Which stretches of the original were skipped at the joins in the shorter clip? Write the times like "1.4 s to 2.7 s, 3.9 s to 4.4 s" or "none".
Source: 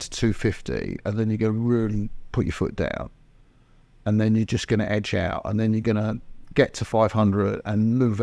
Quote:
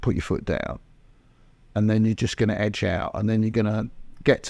none